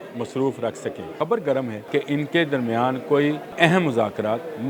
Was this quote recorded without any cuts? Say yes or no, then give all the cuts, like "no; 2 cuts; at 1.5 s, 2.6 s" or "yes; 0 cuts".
no; 3 cuts; at 1.1 s, 1.9 s, 3.5 s